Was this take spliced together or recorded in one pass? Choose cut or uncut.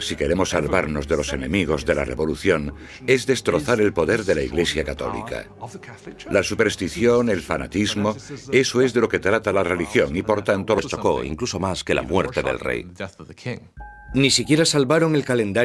uncut